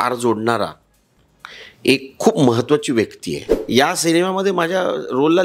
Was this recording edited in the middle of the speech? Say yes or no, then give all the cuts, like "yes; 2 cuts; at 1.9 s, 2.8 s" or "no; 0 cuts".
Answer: yes; 1 cut; at 3.5 s